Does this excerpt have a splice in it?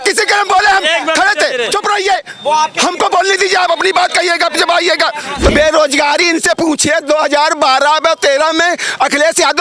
yes; 1 cut; at 5.5 s

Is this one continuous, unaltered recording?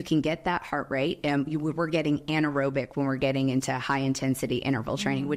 yes; 0 cuts

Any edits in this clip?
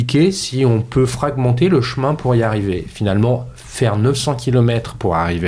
no; 0 cuts

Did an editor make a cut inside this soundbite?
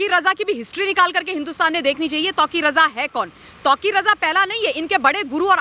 no; 0 cuts

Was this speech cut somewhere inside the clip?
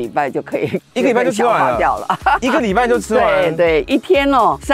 no; 0 cuts

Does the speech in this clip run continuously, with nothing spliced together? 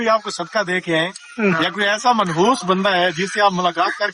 yes; 0 cuts

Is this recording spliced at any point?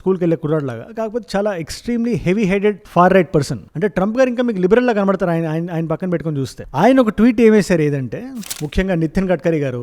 yes; 1 cut; at 8.4 s

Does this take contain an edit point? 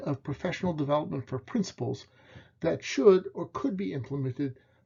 no; 0 cuts

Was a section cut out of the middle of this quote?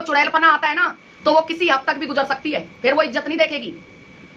no; 0 cuts

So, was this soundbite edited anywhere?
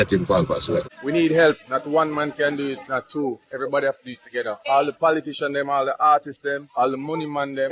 yes; 1 cut; at 0.9 s

